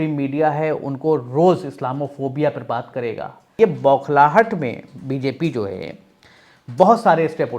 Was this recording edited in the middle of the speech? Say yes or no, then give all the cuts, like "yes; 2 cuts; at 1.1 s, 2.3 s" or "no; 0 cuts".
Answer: yes; 1 cut; at 3.5 s